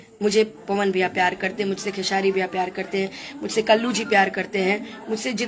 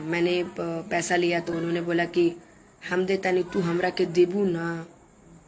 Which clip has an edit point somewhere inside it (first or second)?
second